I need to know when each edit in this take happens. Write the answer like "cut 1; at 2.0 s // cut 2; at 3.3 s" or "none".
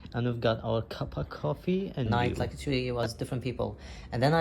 cut 1; at 2.1 s